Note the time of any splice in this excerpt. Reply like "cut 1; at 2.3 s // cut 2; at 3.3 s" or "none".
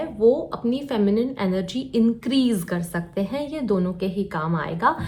none